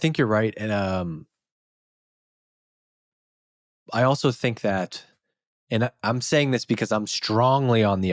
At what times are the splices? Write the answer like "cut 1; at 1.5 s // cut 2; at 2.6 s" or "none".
none